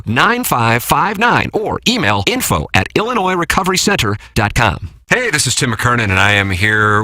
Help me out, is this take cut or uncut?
cut